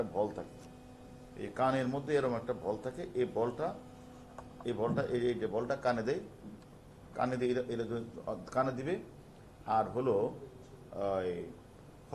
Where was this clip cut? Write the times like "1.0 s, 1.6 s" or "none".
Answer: 1.3 s

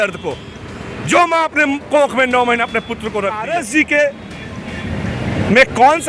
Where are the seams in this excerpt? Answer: 3.4 s

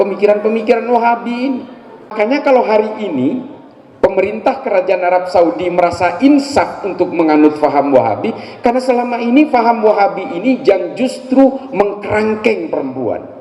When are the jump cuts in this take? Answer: 2.1 s

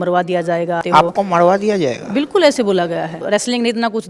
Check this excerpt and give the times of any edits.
0.8 s, 3.2 s

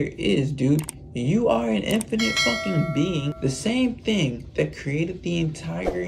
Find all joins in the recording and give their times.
3.3 s

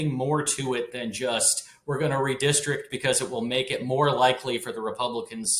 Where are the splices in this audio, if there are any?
none

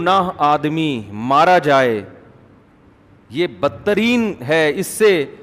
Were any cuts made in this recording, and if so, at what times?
none

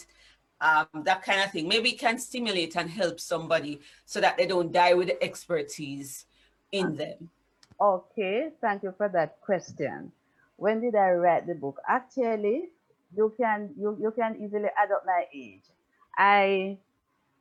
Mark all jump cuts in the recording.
none

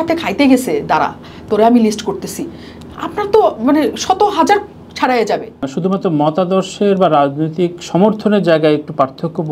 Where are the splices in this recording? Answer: 5.7 s

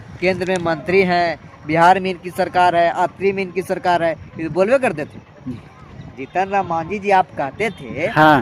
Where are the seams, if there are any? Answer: none

